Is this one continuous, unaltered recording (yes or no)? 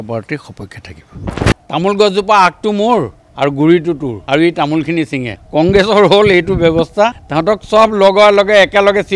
no